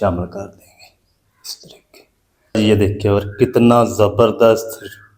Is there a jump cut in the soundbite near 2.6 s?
yes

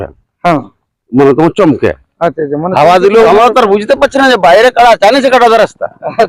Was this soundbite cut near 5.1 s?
no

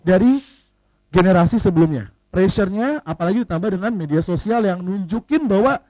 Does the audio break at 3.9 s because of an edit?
no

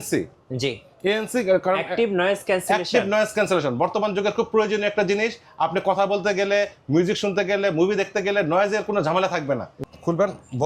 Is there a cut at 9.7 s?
yes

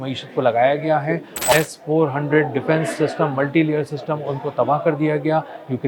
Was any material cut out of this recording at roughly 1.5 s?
yes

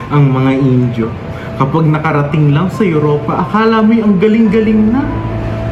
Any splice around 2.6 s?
no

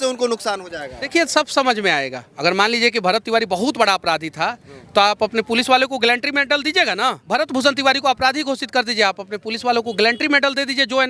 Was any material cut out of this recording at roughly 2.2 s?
yes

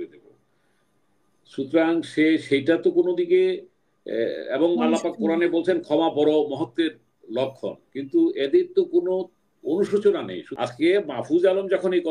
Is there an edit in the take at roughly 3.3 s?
no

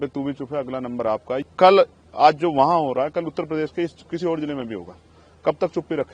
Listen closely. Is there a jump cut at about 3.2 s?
no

